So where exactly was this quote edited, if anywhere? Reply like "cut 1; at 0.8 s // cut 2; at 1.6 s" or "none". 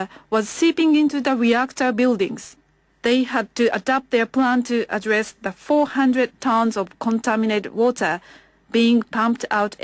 cut 1; at 4.5 s